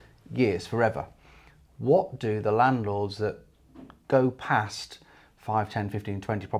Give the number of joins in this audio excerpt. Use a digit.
0